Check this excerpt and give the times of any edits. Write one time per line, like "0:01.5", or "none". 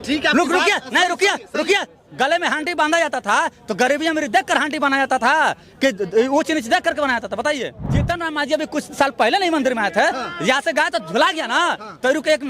0:07.9